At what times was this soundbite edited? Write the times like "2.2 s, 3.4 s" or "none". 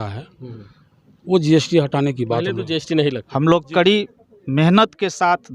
3.2 s